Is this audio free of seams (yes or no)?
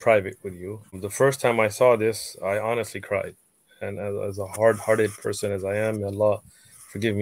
no